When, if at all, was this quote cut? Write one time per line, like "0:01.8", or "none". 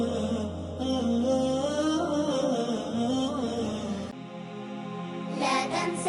0:04.2